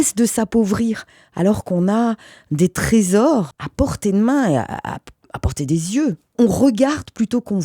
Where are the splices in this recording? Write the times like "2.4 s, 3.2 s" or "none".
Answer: 3.5 s, 6.3 s